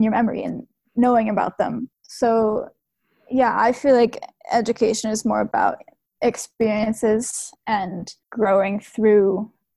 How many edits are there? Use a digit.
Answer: 1